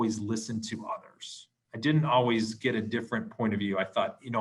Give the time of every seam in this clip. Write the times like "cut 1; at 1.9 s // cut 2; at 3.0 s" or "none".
none